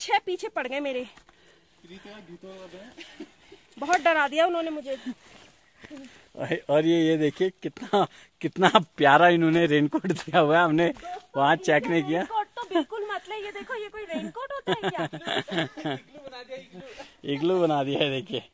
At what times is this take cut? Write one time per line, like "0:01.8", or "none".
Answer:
none